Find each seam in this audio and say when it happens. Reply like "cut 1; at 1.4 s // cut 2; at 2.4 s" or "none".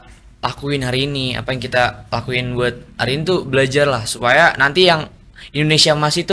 none